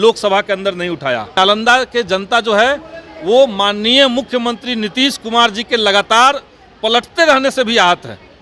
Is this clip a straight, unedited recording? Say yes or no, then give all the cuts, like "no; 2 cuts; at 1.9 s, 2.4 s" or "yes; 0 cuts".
no; 1 cut; at 1.3 s